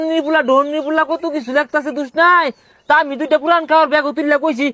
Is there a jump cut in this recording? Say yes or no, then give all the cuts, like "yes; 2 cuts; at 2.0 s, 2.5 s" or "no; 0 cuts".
no; 0 cuts